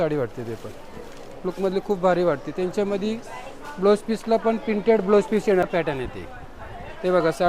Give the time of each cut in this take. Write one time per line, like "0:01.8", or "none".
0:05.6